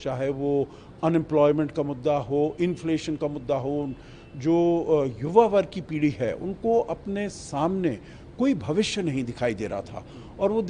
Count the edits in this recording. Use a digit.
0